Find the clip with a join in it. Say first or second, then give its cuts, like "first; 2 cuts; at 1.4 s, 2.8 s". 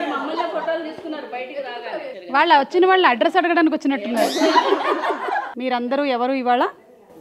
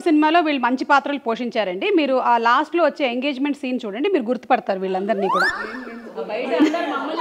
first; 1 cut; at 5.5 s